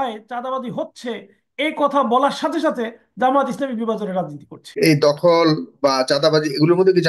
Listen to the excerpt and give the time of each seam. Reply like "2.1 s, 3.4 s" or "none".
4.7 s